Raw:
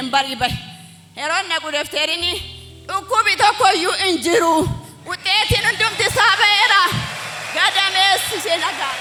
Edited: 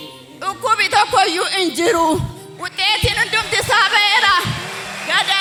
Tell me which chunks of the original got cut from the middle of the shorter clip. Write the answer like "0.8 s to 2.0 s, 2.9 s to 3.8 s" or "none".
none